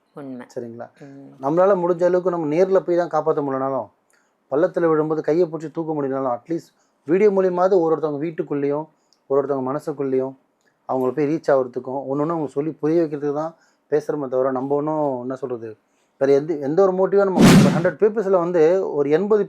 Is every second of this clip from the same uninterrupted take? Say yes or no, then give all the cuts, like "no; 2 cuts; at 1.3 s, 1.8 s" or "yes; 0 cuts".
no; 1 cut; at 17.7 s